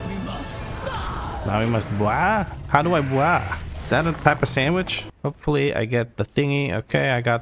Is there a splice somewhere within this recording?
yes; 1 cut; at 5.0 s

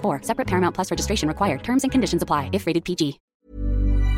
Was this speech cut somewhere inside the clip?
yes; 1 cut; at 3.2 s

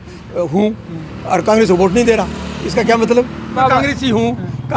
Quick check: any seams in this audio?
yes; 1 cut; at 3.6 s

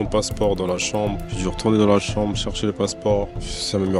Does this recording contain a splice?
no; 0 cuts

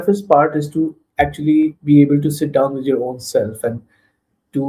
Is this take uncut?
yes; 0 cuts

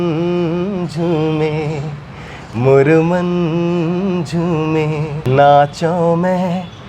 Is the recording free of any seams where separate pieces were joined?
no; 1 cut; at 5.2 s

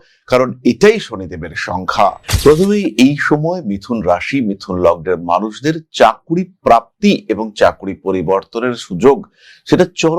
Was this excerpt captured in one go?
no; 1 cut; at 2.2 s

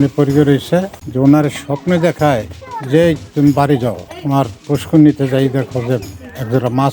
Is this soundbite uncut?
no; 1 cut; at 1.0 s

